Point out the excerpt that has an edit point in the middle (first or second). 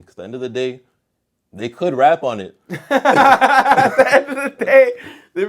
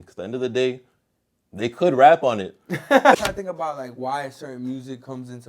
second